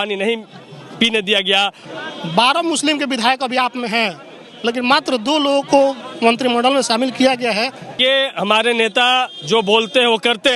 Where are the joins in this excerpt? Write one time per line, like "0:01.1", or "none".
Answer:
0:01.8
0:07.9